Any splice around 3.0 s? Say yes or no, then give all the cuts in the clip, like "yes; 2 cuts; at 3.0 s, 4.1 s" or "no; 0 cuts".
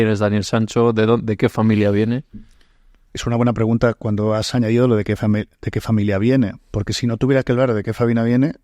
no; 0 cuts